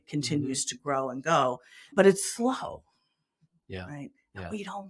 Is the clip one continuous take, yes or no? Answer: yes